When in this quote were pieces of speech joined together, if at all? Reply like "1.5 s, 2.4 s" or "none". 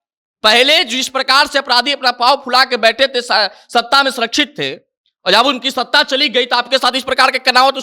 none